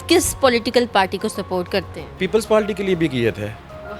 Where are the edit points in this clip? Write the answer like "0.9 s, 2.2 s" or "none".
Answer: 2.2 s